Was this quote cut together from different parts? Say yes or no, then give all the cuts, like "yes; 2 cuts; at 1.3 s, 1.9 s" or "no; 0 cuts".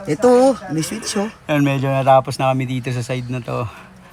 no; 0 cuts